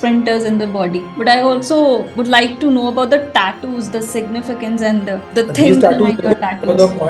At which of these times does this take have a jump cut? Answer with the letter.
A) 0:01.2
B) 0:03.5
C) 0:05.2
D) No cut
D